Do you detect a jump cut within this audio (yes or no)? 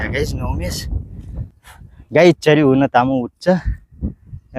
yes